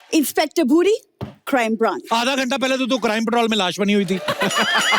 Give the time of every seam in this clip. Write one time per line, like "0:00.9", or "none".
0:02.0